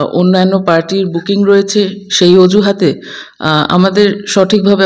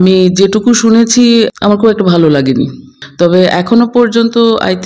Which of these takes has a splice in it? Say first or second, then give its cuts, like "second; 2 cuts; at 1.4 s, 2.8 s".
second; 2 cuts; at 1.5 s, 3.0 s